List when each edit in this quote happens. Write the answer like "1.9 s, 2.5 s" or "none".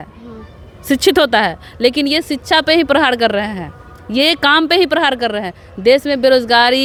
none